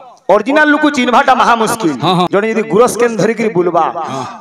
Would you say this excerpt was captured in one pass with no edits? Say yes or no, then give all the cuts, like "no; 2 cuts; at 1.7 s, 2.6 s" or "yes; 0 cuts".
no; 1 cut; at 2.3 s